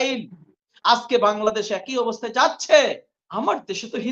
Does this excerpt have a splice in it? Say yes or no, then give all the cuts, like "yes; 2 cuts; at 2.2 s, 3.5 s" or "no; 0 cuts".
yes; 1 cut; at 3.2 s